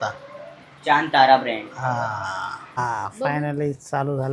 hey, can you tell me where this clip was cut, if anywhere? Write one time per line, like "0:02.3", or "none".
0:02.8